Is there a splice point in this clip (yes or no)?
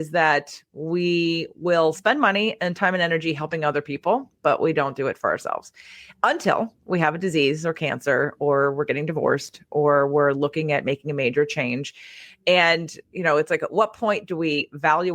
no